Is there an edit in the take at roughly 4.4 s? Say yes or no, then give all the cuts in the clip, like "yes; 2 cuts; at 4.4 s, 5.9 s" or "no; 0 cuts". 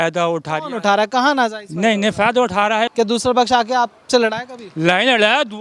no; 1 cut; at 2.9 s